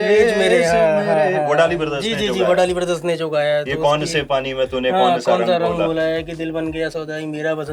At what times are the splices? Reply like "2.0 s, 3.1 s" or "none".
none